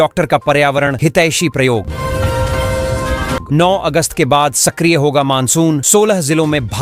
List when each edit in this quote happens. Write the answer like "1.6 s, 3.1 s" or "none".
none